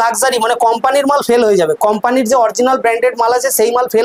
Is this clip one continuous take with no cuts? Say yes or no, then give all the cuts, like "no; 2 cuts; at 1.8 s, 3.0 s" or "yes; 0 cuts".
yes; 0 cuts